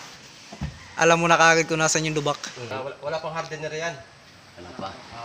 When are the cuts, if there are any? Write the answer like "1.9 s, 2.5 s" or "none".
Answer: 2.7 s